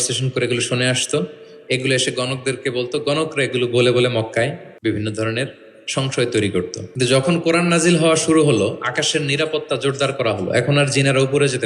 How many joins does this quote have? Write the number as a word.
two